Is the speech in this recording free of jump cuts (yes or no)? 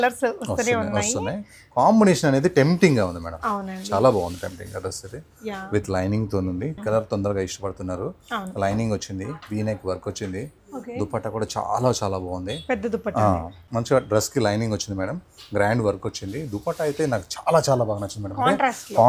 no